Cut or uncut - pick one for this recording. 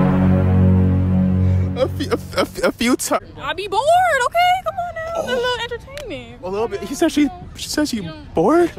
cut